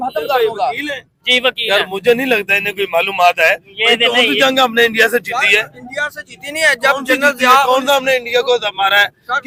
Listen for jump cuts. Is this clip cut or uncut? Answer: uncut